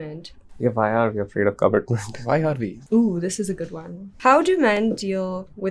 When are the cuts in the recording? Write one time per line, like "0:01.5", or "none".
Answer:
0:02.7